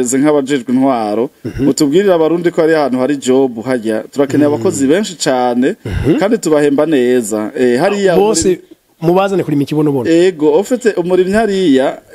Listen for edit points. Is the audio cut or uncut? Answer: uncut